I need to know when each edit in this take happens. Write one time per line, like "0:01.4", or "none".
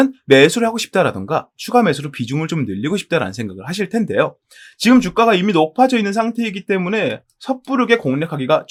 none